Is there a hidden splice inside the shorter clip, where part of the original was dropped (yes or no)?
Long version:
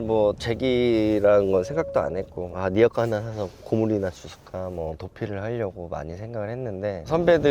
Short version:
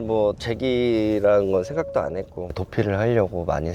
yes